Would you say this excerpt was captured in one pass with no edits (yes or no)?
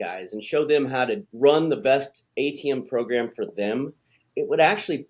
no